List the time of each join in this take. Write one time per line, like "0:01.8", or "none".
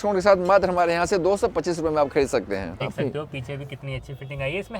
0:02.9

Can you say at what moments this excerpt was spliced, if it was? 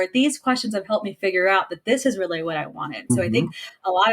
0:03.1

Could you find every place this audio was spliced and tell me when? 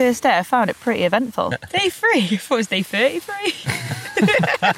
0:01.5

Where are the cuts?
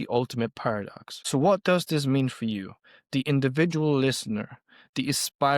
0:01.2

